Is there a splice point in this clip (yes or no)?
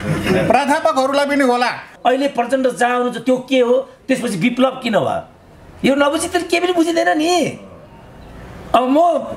yes